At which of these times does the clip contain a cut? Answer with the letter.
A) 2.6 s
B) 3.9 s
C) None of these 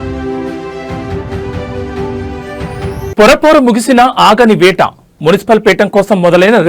A